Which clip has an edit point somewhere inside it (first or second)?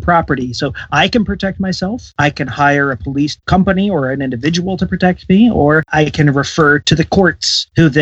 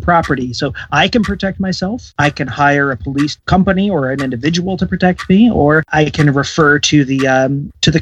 first